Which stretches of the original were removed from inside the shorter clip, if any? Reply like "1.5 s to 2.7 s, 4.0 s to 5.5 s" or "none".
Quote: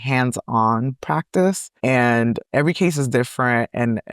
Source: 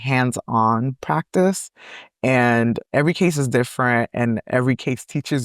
1.7 s to 2.1 s